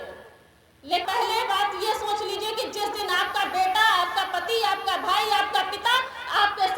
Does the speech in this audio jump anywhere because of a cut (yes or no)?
yes